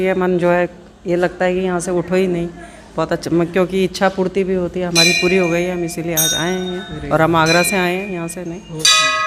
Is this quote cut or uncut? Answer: uncut